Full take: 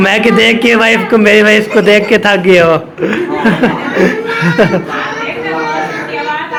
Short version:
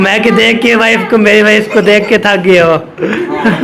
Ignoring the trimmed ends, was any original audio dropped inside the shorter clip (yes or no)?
no